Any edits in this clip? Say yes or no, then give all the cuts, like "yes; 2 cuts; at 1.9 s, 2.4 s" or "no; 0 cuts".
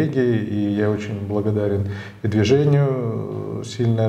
no; 0 cuts